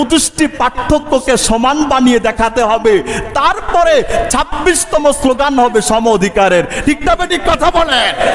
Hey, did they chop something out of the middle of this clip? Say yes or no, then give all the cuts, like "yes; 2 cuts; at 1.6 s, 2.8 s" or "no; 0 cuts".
no; 0 cuts